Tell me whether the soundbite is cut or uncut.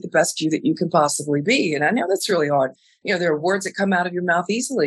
cut